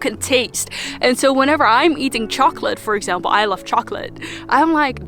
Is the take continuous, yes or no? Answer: yes